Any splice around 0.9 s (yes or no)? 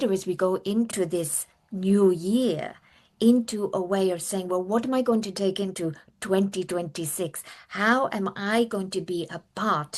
yes